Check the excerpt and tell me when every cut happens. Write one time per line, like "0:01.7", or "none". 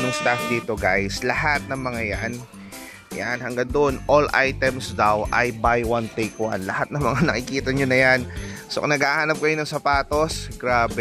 none